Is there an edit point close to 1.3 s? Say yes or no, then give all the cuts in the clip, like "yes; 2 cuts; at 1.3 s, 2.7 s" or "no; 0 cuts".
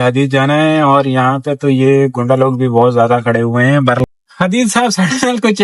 no; 1 cut; at 4.1 s